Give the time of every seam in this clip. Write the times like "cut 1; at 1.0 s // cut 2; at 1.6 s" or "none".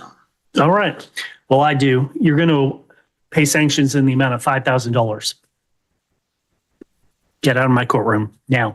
none